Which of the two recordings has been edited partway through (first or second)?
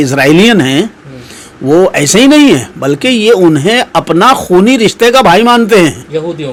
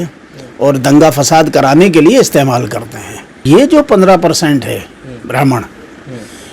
second